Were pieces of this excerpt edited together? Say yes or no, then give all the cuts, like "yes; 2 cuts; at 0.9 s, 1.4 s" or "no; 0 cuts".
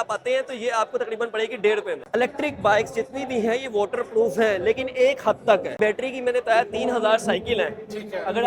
yes; 2 cuts; at 2.0 s, 5.7 s